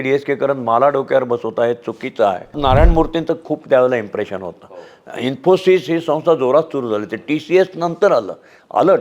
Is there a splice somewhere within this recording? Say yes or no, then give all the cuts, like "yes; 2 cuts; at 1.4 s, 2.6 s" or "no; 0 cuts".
yes; 1 cut; at 2.6 s